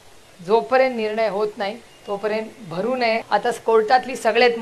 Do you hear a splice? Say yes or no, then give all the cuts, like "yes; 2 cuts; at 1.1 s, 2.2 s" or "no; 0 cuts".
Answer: yes; 1 cut; at 3.2 s